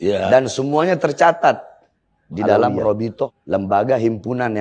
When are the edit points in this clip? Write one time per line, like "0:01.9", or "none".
0:03.3